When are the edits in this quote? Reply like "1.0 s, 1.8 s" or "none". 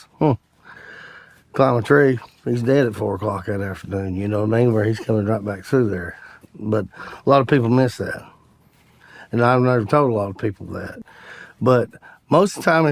11.0 s